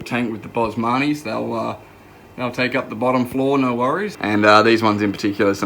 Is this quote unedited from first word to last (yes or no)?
no